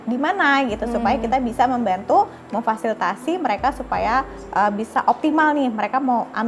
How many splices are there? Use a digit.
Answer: 0